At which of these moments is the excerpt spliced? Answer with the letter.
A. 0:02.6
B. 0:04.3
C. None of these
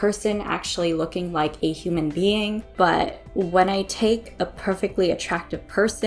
A